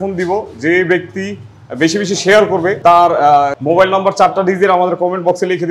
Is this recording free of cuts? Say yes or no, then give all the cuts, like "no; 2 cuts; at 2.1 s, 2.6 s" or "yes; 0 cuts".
no; 2 cuts; at 2.8 s, 3.6 s